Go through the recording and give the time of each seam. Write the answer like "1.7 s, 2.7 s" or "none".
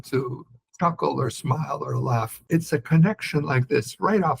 2.4 s